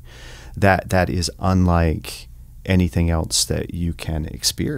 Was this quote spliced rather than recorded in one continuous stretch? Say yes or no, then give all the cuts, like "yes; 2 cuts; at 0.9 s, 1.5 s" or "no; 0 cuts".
no; 0 cuts